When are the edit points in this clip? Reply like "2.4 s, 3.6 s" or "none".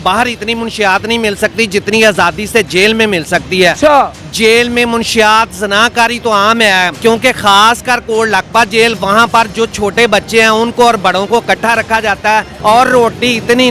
4.2 s, 6.9 s, 12.5 s